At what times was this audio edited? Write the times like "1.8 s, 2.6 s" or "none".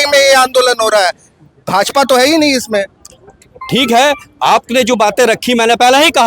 none